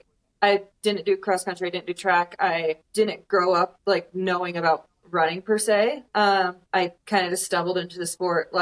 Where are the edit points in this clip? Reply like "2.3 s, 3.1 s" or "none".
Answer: 2.8 s, 3.8 s, 6.6 s